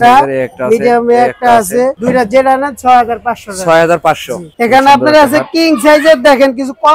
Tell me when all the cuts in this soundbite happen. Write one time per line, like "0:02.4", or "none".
0:04.4